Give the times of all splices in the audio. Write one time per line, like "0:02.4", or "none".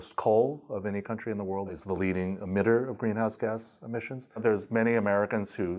0:01.8
0:04.4